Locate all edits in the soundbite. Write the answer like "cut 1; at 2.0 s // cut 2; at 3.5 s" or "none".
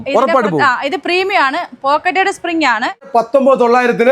cut 1; at 3.1 s